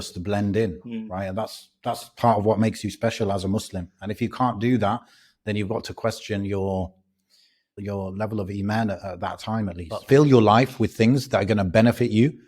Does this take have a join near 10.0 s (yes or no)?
yes